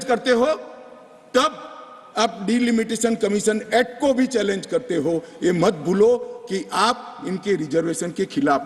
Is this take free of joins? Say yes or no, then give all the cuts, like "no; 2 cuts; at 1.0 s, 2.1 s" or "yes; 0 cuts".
yes; 0 cuts